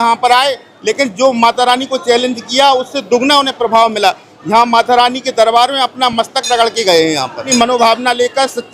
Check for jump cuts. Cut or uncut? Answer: cut